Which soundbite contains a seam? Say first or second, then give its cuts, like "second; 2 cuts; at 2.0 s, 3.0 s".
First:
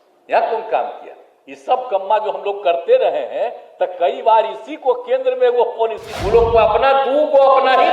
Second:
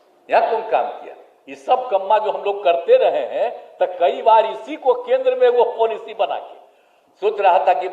first; 1 cut; at 6.1 s